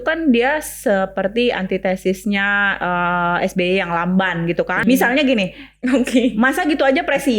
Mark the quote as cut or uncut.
cut